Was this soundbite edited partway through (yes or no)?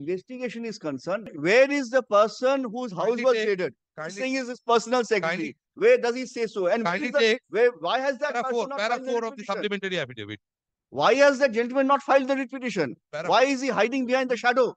yes